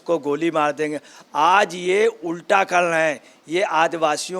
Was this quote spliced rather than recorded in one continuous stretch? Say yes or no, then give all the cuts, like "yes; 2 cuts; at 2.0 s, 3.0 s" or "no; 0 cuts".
no; 0 cuts